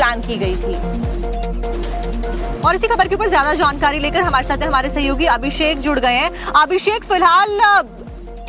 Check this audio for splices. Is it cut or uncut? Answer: cut